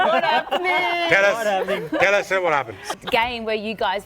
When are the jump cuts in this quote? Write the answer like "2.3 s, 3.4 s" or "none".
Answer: 2.9 s